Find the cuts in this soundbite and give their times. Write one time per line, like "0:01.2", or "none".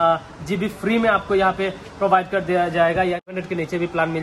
0:03.3

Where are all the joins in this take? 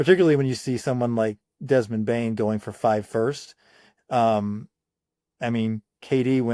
none

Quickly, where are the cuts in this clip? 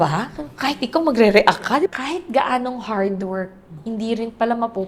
0:01.8
0:03.7

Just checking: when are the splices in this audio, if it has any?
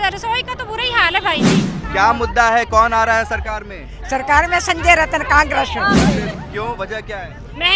0:01.7
0:06.3

